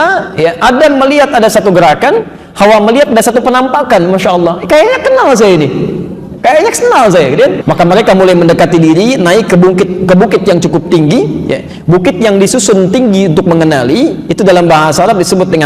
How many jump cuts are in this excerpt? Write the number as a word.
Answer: one